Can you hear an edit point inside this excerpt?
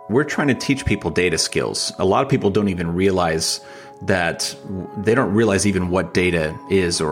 no; 0 cuts

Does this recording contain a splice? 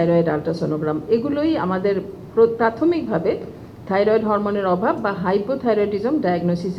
no; 0 cuts

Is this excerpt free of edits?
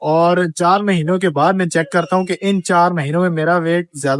yes; 0 cuts

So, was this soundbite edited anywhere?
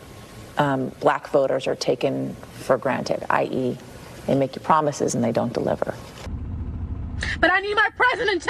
yes; 1 cut; at 6.1 s

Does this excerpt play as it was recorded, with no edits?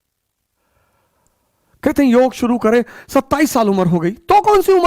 yes; 0 cuts

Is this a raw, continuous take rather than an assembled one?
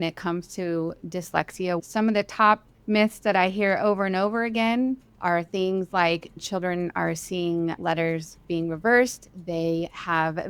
no; 3 cuts; at 1.8 s, 6.4 s, 7.8 s

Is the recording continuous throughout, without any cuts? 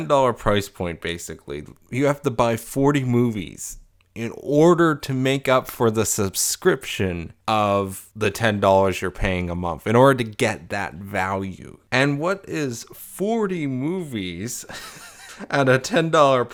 yes; 0 cuts

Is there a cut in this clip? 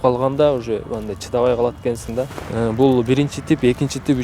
yes; 1 cut; at 2.4 s

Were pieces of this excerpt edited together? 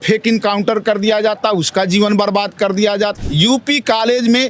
yes; 1 cut; at 3.1 s

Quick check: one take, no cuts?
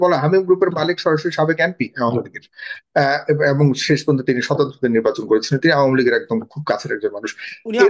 yes; 0 cuts

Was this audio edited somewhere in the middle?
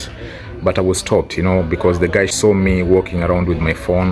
yes; 1 cut; at 2.3 s

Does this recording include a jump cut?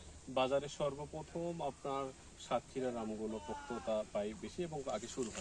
no; 0 cuts

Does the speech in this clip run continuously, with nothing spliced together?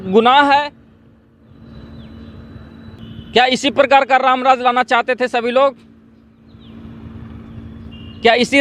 no; 1 cut; at 3.0 s

